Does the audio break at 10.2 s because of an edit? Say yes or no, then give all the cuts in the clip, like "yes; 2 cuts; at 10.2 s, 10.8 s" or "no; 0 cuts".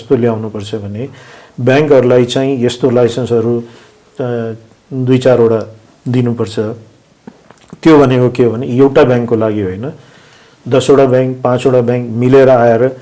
no; 0 cuts